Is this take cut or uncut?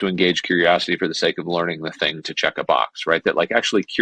uncut